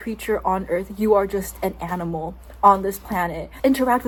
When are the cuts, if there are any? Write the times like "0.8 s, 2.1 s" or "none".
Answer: none